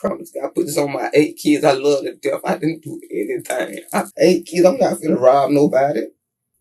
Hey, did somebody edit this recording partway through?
yes; 1 cut; at 4.1 s

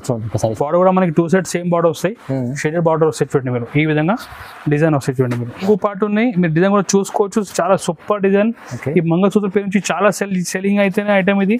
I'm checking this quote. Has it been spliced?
yes; 1 cut; at 5.6 s

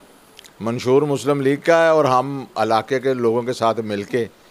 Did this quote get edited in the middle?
no; 0 cuts

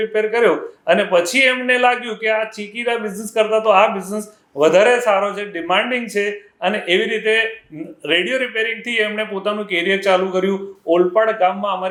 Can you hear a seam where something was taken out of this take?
no; 0 cuts

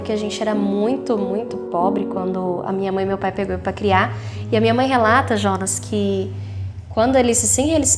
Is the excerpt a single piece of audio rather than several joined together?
yes; 0 cuts

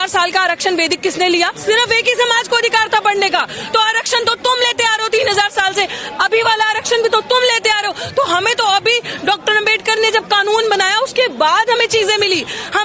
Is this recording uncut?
yes; 0 cuts

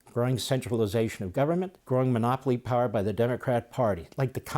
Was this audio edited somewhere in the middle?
yes; 1 cut; at 1.8 s

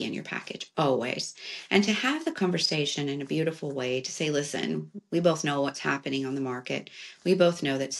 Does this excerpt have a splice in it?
no; 0 cuts

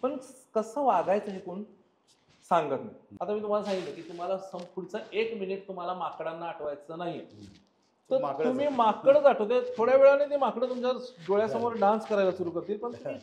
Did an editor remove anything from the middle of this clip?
yes; 1 cut; at 3.0 s

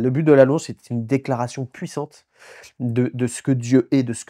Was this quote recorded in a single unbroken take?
yes; 0 cuts

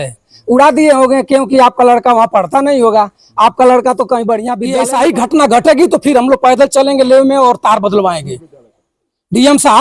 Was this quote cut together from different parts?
yes; 1 cut; at 4.6 s

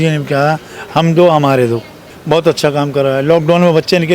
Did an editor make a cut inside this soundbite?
yes; 1 cut; at 2.0 s

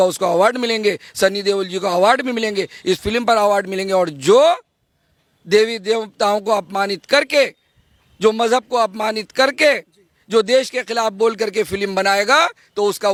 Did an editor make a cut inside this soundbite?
no; 0 cuts

